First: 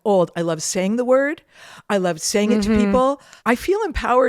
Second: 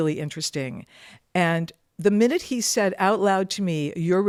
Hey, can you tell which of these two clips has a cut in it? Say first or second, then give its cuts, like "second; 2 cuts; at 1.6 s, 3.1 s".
first; 1 cut; at 3.3 s